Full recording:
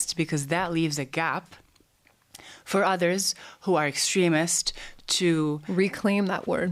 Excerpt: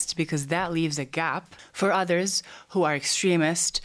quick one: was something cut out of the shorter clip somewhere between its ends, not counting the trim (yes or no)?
yes